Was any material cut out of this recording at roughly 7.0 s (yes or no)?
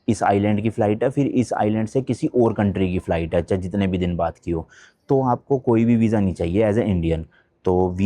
no